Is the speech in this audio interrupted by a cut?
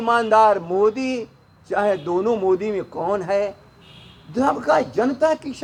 no; 0 cuts

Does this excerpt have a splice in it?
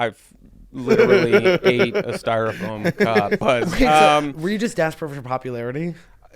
yes; 1 cut; at 3.4 s

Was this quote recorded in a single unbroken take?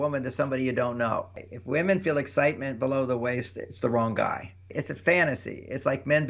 no; 2 cuts; at 1.4 s, 4.8 s

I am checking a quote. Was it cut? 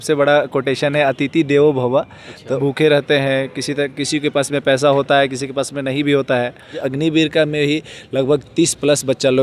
yes; 2 cuts; at 2.6 s, 6.8 s

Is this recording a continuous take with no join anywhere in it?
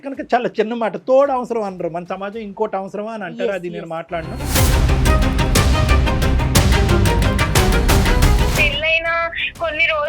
no; 1 cut; at 8.6 s

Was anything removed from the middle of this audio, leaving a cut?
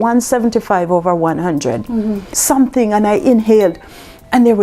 yes; 1 cut; at 2.3 s

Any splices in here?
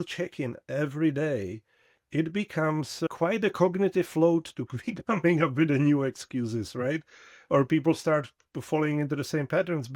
yes; 1 cut; at 3.1 s

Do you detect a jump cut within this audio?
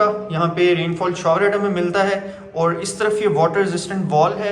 no; 0 cuts

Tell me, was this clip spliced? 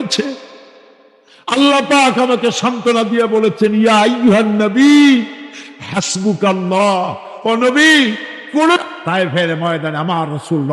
yes; 1 cut; at 8.8 s

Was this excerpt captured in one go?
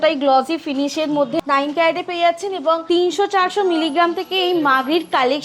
no; 2 cuts; at 1.4 s, 2.8 s

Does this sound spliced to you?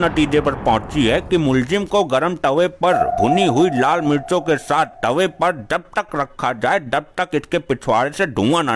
no; 0 cuts

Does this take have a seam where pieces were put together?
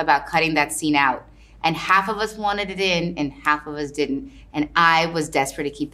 no; 0 cuts

